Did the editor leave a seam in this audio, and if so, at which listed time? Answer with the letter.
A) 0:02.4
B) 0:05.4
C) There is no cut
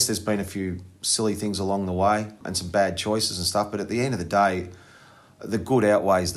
A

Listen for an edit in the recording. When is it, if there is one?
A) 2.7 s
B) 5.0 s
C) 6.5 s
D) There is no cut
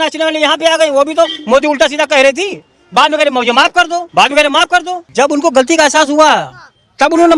B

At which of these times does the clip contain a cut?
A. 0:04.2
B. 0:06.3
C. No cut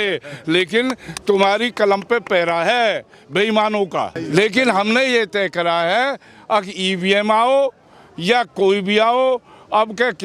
A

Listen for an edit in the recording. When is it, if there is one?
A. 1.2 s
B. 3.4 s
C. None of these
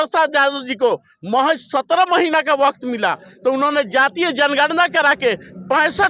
C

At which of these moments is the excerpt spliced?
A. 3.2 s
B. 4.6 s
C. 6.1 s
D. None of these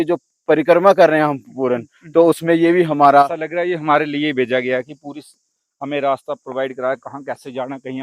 A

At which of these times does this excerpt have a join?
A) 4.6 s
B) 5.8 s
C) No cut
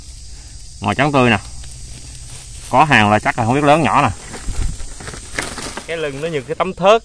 B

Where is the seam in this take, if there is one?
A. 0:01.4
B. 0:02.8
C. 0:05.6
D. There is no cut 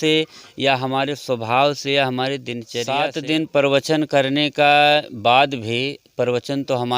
B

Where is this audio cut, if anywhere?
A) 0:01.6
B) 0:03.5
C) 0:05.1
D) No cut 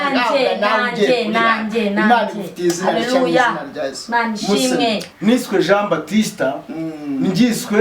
C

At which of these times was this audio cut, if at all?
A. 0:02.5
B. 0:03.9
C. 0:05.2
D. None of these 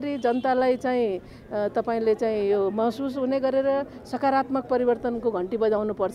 D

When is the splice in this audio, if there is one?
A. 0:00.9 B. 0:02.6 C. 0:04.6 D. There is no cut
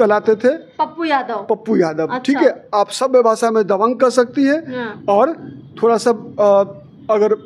D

